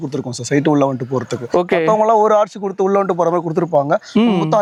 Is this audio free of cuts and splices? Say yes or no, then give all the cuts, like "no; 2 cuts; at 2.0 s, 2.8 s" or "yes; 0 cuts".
yes; 0 cuts